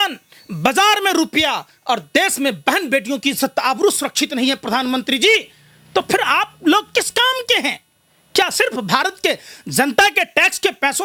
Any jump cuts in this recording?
no; 0 cuts

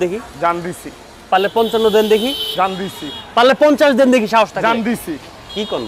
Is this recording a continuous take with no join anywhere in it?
yes; 0 cuts

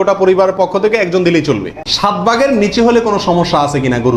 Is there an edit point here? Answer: yes; 1 cut; at 1.9 s

